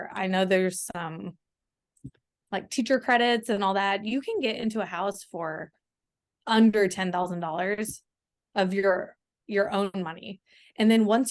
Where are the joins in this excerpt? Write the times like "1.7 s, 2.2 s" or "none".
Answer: none